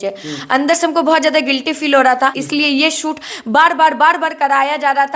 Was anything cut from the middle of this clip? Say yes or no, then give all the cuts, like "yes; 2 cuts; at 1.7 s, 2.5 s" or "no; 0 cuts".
yes; 1 cut; at 2.4 s